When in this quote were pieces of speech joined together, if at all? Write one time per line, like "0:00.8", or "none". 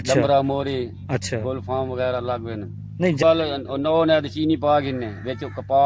0:03.2